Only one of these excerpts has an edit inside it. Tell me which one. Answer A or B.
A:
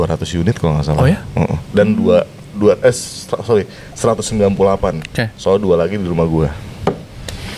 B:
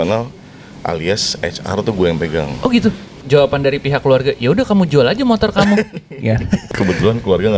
B